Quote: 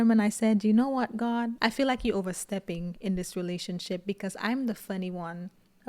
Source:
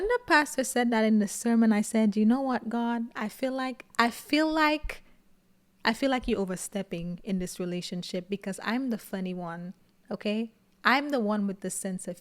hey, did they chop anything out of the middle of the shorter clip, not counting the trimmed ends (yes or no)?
yes